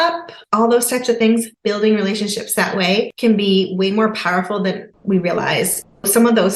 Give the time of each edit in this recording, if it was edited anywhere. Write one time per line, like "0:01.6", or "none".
0:01.5
0:03.1
0:04.9

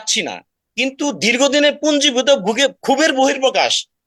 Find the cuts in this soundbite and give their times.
none

